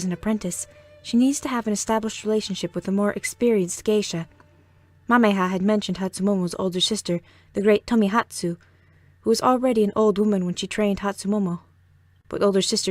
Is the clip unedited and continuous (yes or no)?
no